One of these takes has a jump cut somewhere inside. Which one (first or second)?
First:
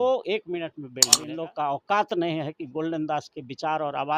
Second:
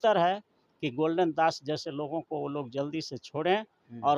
first